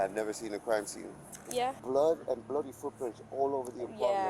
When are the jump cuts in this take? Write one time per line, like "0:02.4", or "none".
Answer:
0:01.8